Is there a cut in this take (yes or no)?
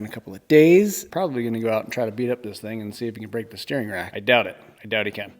yes